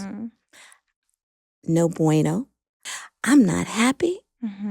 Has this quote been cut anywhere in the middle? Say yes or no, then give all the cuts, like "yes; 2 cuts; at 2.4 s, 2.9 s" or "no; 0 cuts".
yes; 1 cut; at 2.9 s